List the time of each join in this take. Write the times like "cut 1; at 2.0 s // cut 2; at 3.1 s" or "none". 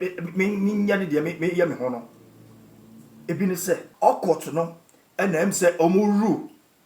cut 1; at 3.9 s

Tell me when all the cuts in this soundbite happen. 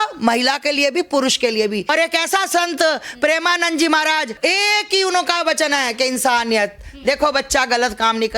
cut 1; at 1.9 s // cut 2; at 4.3 s

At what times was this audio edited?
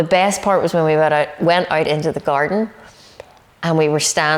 none

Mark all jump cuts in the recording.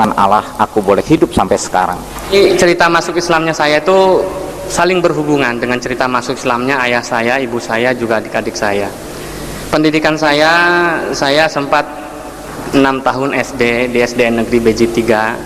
cut 1; at 2.3 s

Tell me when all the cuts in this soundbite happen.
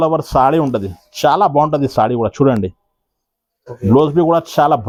none

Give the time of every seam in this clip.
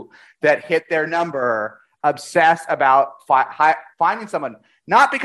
none

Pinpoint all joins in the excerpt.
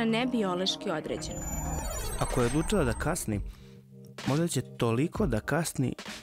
cut 1; at 1.7 s

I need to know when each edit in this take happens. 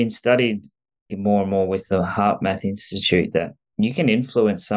cut 1; at 1.2 s

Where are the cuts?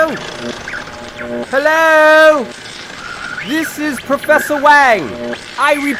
none

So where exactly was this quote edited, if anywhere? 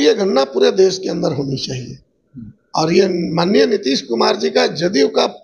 none

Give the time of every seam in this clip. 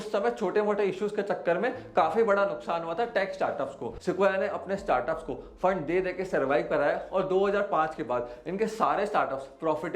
cut 1; at 3.9 s

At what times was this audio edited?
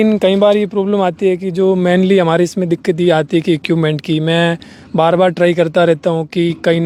none

